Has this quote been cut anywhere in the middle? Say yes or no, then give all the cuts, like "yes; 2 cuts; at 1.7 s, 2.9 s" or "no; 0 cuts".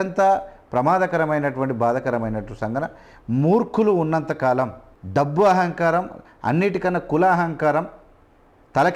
no; 0 cuts